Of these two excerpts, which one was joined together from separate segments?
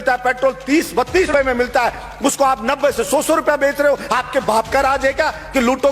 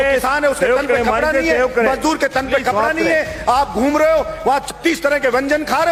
first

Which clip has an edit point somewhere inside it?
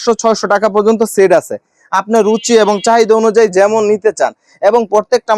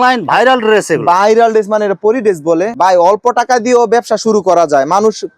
second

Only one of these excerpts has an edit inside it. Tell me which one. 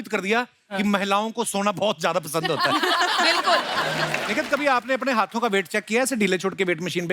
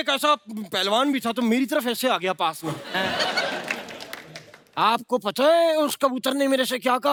first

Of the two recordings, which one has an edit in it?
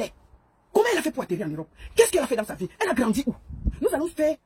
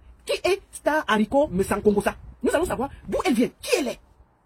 second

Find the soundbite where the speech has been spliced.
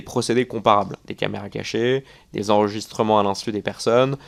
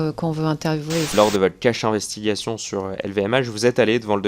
second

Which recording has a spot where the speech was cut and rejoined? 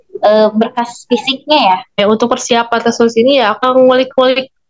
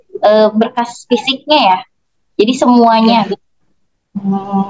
first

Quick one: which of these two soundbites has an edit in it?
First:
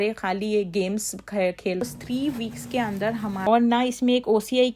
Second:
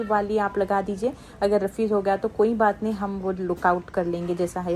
first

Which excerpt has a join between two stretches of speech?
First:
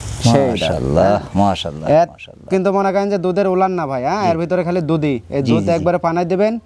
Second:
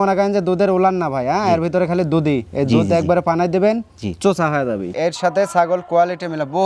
second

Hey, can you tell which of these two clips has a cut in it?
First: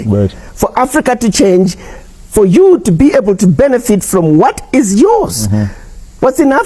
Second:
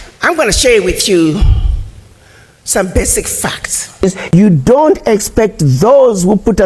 second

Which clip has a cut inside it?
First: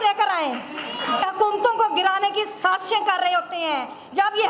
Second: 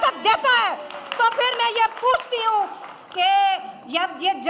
first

